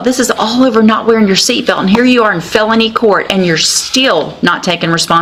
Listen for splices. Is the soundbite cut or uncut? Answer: uncut